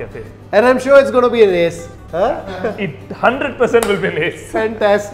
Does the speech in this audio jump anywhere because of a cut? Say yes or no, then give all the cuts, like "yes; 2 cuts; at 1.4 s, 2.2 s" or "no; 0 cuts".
no; 0 cuts